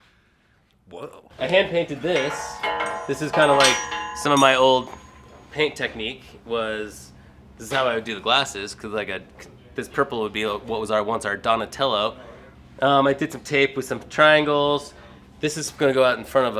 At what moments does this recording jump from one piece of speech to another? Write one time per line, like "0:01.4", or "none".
none